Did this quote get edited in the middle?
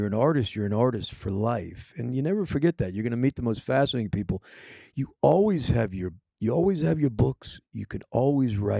no; 0 cuts

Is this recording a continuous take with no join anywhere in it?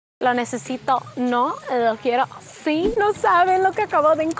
no; 1 cut; at 2.9 s

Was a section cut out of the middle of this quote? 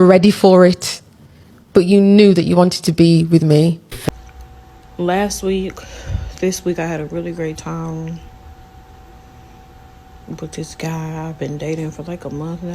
yes; 1 cut; at 4.1 s

